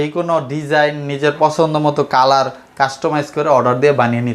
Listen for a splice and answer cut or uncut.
uncut